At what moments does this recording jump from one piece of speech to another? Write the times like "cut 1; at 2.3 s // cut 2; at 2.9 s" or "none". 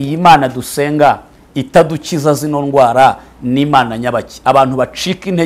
none